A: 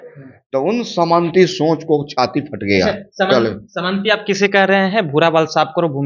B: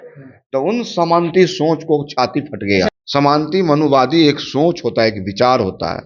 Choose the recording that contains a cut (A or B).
B